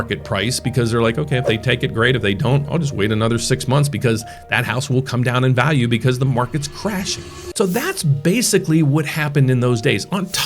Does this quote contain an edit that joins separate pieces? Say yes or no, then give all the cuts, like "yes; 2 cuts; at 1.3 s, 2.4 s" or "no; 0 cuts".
yes; 1 cut; at 7.4 s